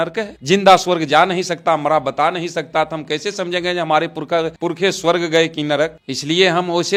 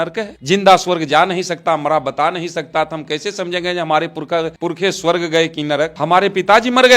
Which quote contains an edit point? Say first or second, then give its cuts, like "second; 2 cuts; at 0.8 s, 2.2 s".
second; 1 cut; at 5.9 s